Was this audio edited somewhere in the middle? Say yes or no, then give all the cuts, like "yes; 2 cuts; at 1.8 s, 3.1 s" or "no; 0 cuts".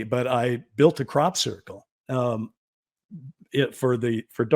no; 0 cuts